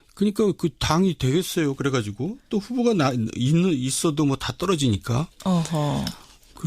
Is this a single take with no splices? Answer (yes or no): no